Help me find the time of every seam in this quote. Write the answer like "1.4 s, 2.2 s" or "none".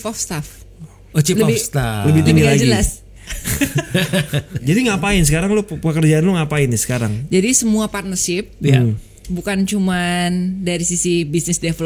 4.6 s